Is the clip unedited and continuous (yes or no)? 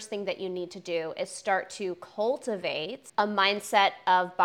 no